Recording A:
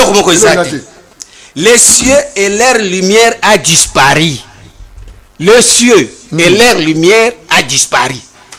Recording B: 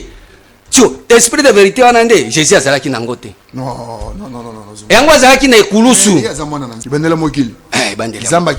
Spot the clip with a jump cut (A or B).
B